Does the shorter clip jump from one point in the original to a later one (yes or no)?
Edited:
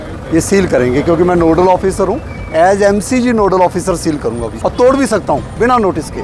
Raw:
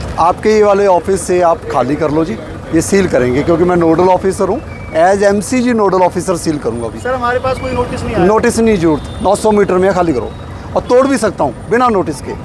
yes